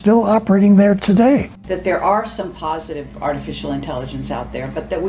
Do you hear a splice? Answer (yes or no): yes